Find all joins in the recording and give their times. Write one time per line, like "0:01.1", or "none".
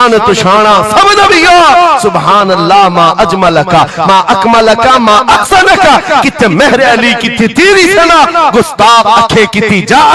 none